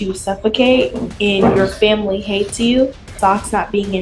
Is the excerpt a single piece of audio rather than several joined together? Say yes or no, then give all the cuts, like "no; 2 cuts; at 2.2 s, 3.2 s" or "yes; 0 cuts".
no; 1 cut; at 3.1 s